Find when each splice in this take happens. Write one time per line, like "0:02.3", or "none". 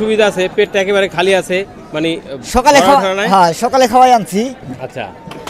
none